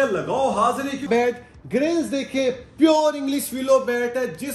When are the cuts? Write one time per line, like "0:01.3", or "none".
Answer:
0:01.1